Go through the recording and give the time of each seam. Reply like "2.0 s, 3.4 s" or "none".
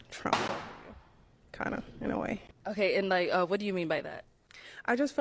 3.0 s